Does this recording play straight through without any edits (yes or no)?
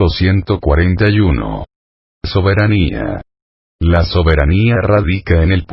no